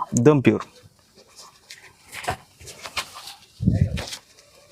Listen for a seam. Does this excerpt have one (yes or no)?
no